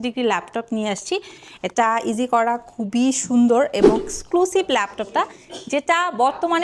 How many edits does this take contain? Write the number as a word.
one